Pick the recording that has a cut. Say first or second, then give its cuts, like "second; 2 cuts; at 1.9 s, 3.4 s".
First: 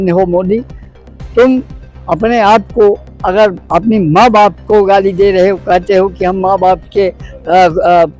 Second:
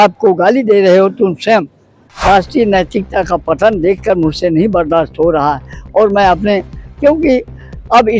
second; 1 cut; at 2.0 s